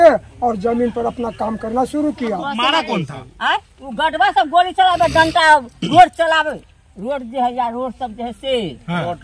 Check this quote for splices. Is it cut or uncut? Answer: cut